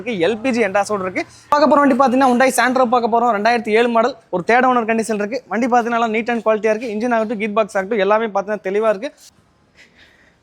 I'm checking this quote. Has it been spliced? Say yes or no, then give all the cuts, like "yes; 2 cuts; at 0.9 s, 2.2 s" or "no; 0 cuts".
yes; 2 cuts; at 1.5 s, 9.3 s